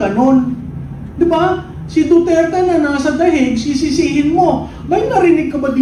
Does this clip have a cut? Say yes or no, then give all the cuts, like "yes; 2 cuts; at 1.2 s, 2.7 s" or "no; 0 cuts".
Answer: no; 0 cuts